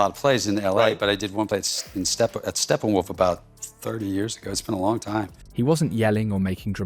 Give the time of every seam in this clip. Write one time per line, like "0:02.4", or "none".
none

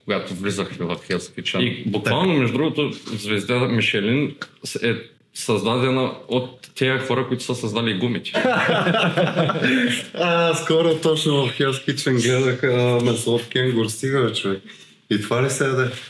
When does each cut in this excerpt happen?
0:01.6
0:08.4

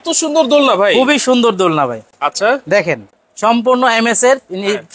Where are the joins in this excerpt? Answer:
none

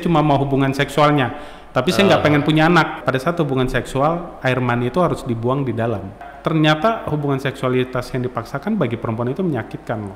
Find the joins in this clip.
0:03.0
0:06.2

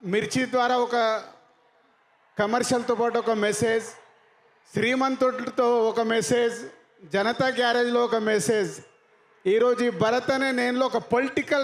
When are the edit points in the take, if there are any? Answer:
none

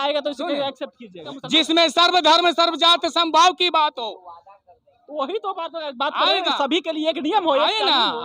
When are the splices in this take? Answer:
0:01.3

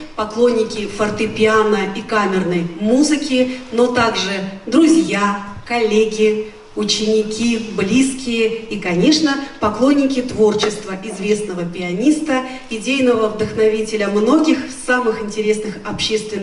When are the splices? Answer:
none

